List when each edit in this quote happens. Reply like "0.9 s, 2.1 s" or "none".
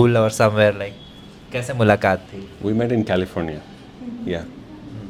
none